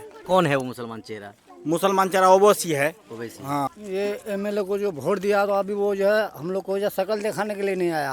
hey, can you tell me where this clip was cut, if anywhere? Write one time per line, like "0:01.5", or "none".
0:03.8